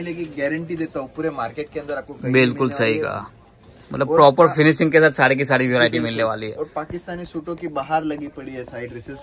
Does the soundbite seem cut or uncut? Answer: uncut